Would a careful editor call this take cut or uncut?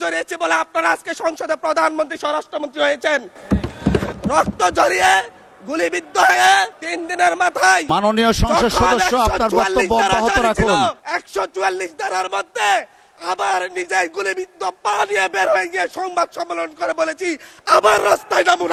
uncut